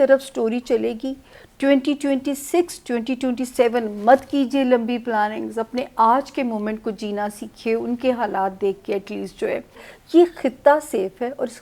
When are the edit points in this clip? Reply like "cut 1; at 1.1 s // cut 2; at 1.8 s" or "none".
cut 1; at 9.9 s